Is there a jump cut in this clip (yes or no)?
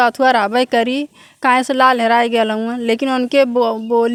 no